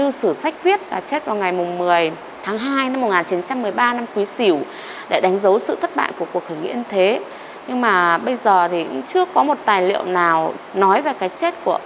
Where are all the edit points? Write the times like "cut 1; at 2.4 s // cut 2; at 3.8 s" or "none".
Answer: cut 1; at 2.3 s // cut 2; at 10.5 s